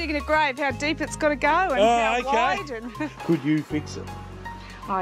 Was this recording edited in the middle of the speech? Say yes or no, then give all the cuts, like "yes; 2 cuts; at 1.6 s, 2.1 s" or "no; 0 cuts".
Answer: yes; 1 cut; at 3.0 s